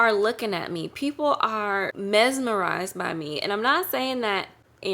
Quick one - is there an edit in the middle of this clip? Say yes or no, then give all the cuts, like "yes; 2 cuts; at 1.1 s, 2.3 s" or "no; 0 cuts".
yes; 1 cut; at 1.9 s